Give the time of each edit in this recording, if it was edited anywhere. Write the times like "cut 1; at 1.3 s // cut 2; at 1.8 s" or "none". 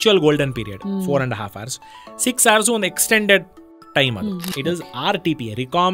cut 1; at 4.5 s